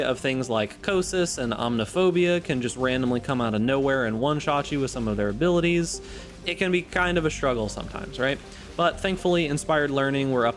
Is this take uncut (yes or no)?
yes